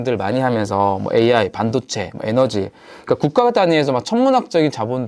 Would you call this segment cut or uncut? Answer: uncut